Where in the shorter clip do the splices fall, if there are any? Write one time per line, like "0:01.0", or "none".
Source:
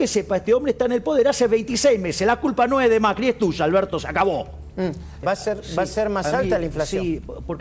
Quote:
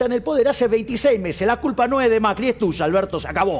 none